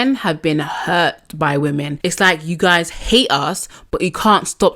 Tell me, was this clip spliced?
yes; 1 cut; at 1.9 s

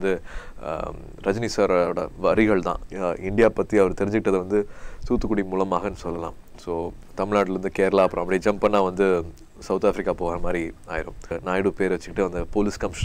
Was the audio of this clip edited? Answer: yes; 3 cuts; at 2.8 s, 7.0 s, 11.4 s

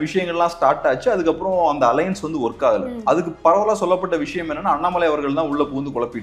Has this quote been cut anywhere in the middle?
no; 0 cuts

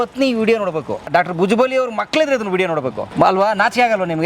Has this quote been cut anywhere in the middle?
yes; 2 cuts; at 1.1 s, 3.0 s

